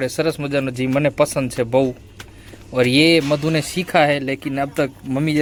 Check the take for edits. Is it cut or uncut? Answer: uncut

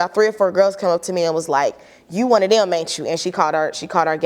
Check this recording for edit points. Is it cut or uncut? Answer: uncut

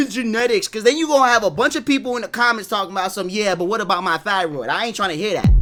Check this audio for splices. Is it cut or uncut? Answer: uncut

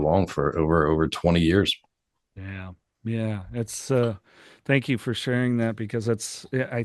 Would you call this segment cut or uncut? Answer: uncut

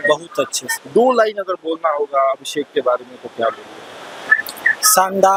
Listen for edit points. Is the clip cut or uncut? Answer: uncut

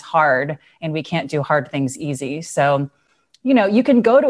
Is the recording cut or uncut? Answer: uncut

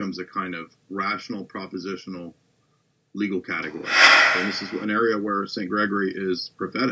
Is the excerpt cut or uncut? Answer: cut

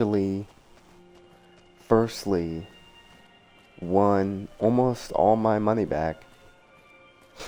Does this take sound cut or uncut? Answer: uncut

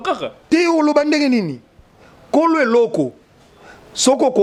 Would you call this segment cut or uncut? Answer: uncut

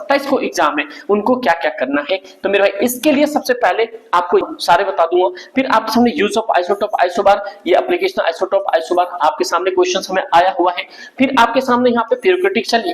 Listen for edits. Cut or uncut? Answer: cut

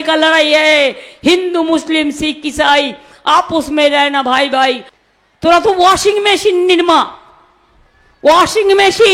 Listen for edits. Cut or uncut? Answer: cut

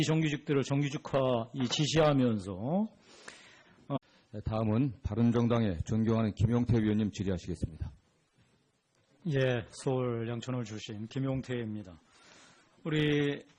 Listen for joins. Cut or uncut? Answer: uncut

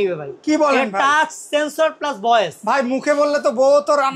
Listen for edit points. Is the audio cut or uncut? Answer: uncut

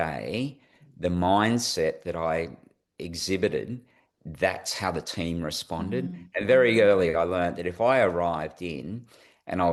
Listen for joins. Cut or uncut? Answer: uncut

